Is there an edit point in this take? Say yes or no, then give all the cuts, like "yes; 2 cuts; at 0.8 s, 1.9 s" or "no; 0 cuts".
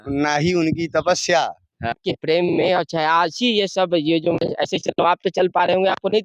yes; 1 cut; at 2.0 s